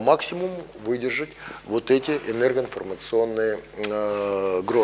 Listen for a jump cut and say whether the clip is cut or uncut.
uncut